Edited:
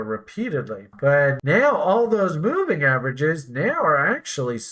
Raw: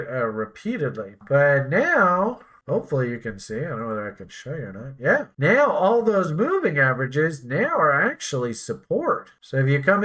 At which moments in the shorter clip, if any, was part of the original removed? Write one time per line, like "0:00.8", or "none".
0:01.4

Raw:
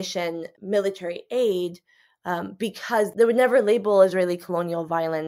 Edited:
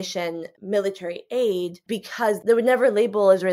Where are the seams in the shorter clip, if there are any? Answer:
0:01.8

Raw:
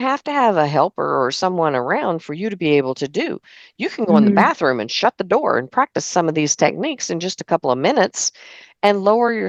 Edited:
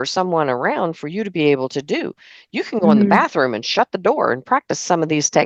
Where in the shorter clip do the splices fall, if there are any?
none

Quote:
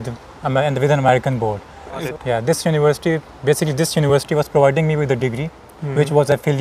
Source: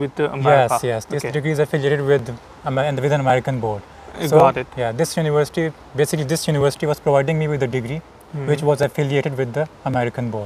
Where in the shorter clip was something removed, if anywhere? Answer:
0:02.0

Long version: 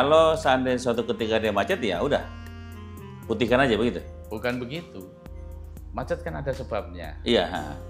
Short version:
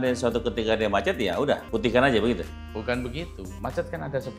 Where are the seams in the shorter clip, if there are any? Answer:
0:01.6
0:03.4

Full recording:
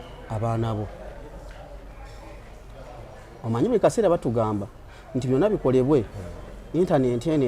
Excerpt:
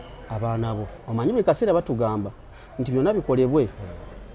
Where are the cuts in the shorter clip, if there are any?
0:01.0

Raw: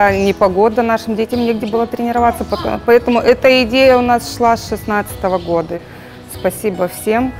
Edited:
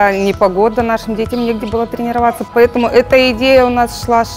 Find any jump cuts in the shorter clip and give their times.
0:02.5

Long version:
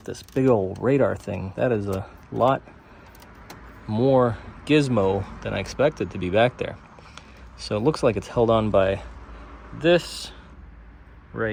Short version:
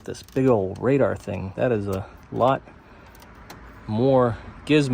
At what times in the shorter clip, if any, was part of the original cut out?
none

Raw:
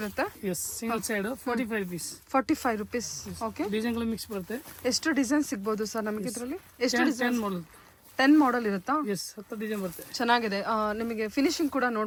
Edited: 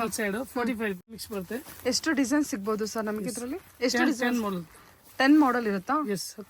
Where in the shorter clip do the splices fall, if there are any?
0:01.2

